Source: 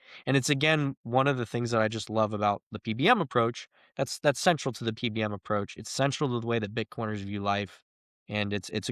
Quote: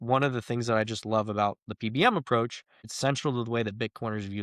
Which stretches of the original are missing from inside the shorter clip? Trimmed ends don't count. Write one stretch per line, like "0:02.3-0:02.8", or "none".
0:03.8-0:05.8